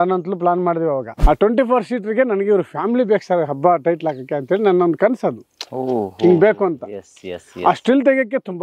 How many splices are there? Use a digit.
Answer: 1